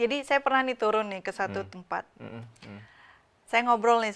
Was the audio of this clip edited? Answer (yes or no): no